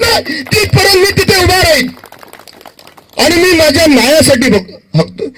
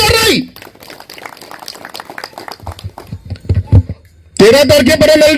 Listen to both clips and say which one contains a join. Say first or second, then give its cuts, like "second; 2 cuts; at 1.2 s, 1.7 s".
second; 1 cut; at 3.9 s